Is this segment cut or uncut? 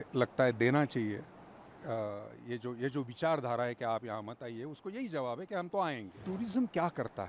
cut